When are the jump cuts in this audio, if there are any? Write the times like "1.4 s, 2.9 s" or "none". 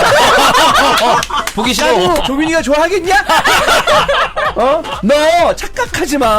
2.2 s